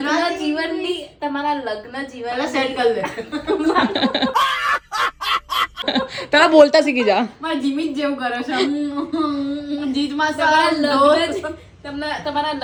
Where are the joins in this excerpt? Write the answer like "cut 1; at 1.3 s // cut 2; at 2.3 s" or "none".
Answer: none